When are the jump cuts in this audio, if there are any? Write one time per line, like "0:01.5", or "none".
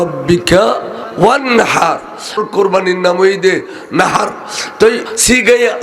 0:02.3